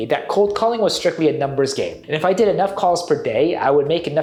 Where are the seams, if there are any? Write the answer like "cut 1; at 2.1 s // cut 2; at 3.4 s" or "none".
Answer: none